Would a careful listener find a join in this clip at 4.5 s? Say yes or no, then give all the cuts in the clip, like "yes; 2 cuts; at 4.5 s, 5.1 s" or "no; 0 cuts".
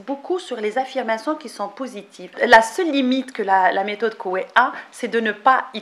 no; 1 cut; at 2.3 s